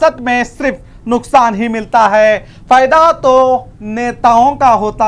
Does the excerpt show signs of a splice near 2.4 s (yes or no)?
no